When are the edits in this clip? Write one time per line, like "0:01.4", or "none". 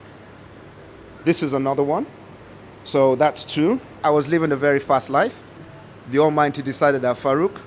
0:04.0